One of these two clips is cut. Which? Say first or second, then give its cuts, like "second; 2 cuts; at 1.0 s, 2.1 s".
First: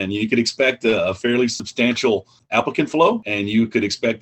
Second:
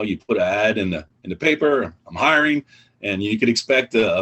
first; 2 cuts; at 2.2 s, 3.3 s